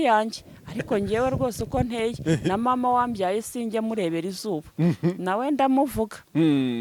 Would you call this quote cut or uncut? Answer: uncut